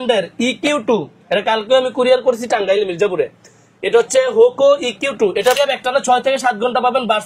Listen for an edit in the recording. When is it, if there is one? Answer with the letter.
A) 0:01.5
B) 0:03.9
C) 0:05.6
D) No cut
C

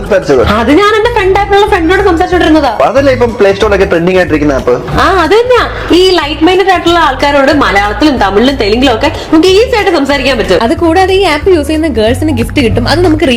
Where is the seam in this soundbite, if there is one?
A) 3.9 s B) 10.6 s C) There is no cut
C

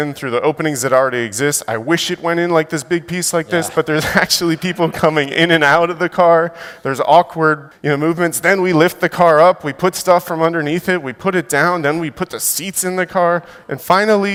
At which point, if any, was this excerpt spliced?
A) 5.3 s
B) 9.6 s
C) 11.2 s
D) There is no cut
D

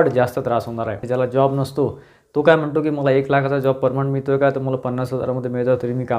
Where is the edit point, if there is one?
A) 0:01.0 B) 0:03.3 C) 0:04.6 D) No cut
A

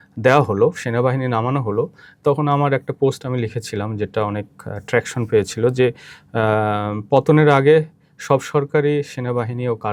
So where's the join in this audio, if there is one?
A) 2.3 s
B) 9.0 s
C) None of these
C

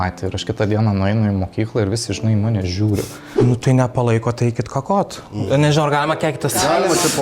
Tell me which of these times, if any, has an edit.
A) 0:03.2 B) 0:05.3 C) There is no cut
A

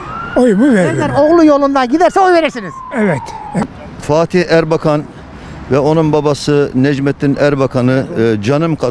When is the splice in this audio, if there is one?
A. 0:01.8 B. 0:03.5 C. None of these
B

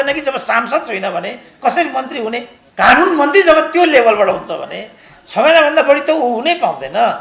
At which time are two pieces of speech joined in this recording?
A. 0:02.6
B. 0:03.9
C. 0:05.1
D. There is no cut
A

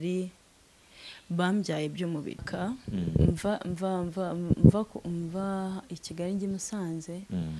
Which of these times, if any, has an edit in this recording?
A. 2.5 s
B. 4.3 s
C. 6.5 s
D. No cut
A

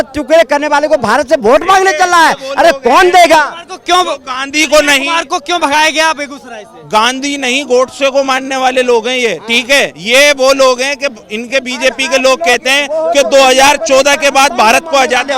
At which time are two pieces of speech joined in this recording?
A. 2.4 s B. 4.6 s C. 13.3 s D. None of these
D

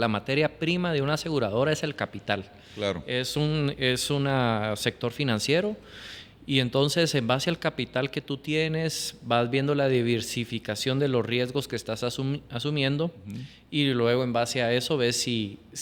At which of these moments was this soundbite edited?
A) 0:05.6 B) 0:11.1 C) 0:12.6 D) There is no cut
D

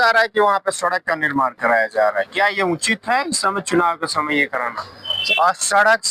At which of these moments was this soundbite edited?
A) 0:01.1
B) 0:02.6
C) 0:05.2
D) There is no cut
C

